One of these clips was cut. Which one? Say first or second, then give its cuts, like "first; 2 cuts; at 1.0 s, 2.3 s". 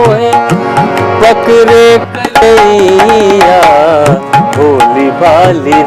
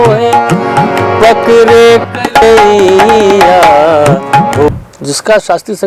second; 1 cut; at 4.7 s